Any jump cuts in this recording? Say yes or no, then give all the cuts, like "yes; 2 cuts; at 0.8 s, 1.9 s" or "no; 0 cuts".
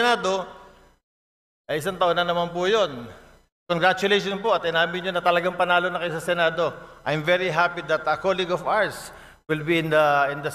no; 0 cuts